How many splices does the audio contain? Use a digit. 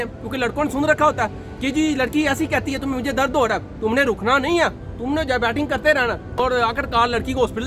1